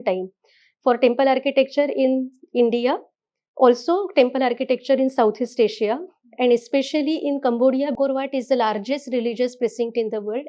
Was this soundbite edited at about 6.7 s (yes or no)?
no